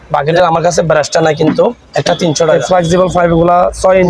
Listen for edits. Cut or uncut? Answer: cut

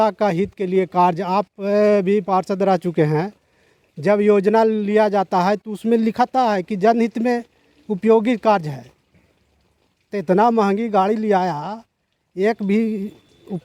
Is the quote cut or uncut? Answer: uncut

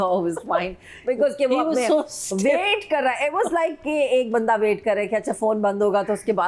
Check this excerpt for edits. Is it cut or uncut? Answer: uncut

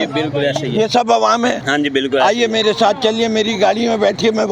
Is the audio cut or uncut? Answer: cut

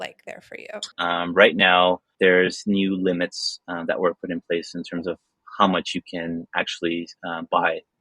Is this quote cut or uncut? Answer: cut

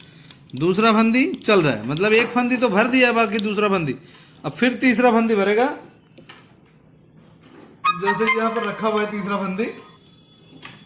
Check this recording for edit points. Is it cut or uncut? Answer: uncut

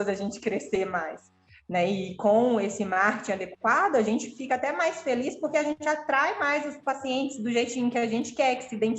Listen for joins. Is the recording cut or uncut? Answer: uncut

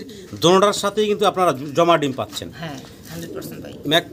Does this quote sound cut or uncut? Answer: uncut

